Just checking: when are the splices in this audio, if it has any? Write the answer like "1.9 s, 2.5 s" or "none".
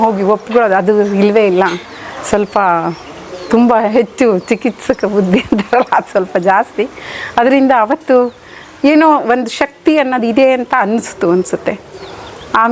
none